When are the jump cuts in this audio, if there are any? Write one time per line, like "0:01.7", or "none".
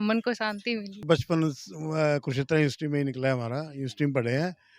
0:01.0

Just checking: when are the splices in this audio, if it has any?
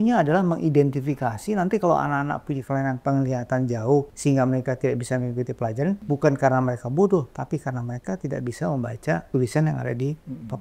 0:04.1
0:06.0
0:09.2

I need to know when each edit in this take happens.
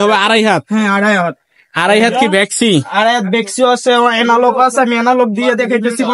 none

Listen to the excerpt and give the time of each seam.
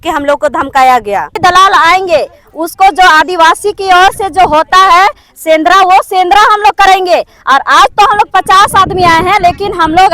0:01.4

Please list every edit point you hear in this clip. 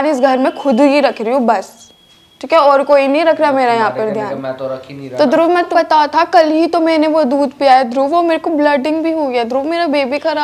0:05.7

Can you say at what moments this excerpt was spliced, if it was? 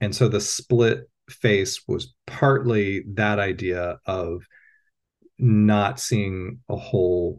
none

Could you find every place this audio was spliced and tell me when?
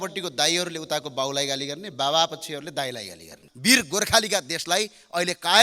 0:03.5

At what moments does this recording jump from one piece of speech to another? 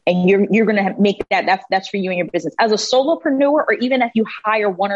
none

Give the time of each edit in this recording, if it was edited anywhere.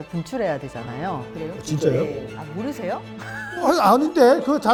none

